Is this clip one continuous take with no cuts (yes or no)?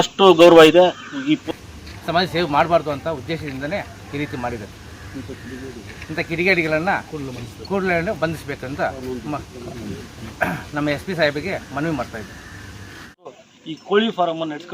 no